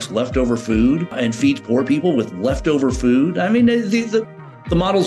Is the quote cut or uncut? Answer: cut